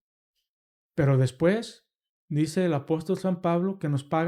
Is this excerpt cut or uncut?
uncut